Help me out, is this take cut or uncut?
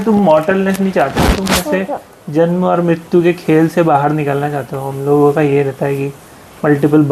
uncut